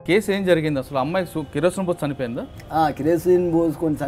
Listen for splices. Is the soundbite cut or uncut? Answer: uncut